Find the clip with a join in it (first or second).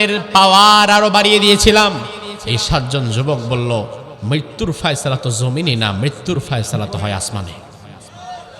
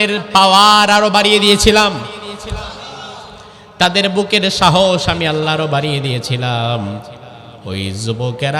first